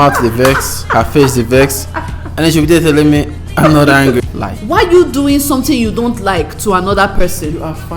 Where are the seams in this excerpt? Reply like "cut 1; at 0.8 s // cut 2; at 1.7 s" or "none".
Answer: cut 1; at 4.2 s